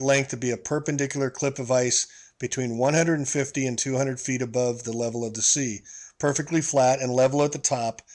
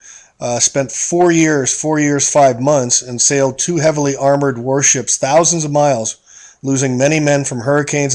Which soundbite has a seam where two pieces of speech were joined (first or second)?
first